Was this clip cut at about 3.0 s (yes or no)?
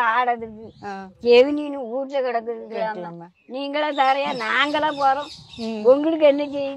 no